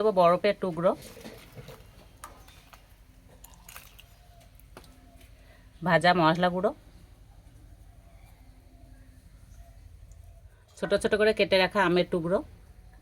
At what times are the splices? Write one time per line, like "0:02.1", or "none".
0:10.7